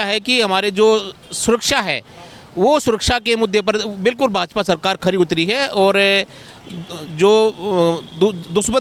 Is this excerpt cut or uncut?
uncut